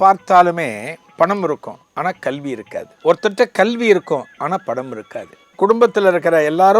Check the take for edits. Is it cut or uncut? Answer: cut